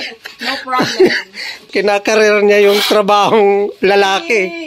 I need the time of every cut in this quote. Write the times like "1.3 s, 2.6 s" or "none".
1.7 s